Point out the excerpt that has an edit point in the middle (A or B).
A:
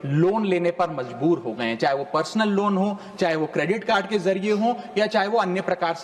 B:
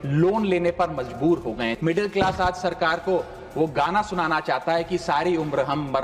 B